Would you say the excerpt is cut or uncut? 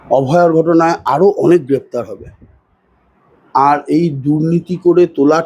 uncut